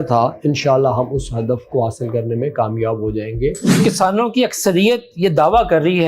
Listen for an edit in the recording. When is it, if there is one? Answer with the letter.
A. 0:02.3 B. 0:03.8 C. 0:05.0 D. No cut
B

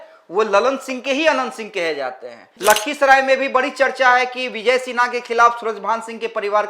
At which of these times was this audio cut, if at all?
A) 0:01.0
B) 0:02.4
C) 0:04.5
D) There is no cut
B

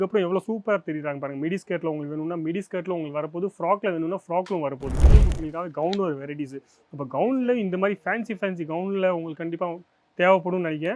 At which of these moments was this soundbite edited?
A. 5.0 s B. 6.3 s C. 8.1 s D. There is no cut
A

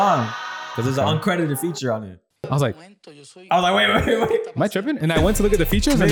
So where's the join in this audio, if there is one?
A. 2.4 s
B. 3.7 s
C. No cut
A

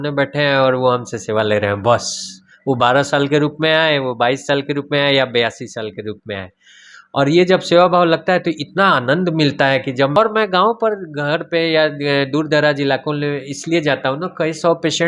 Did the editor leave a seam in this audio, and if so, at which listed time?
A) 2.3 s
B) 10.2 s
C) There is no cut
B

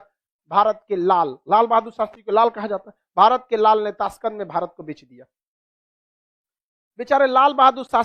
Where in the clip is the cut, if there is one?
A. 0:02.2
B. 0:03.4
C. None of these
C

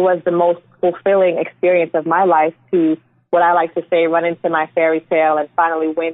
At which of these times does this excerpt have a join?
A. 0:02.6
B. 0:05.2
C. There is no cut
C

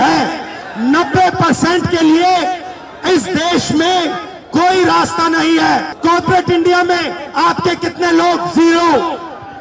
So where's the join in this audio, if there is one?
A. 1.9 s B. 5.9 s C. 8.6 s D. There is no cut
B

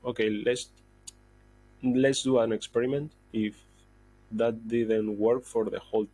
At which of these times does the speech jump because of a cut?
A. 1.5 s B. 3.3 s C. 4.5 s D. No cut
B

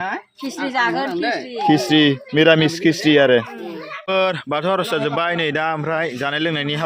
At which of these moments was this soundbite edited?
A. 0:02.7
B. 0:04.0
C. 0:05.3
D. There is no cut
B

